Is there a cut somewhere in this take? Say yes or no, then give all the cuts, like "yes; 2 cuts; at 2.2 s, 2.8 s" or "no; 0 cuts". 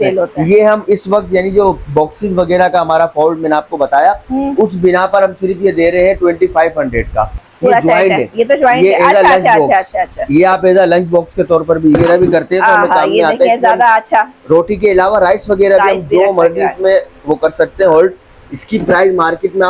yes; 2 cuts; at 7.4 s, 12.0 s